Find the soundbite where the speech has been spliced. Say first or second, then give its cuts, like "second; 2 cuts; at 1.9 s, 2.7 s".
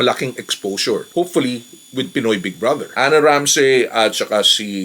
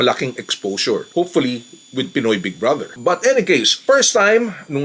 first; 1 cut; at 2.9 s